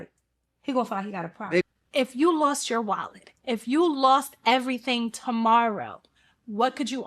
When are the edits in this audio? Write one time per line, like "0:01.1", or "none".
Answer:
0:01.6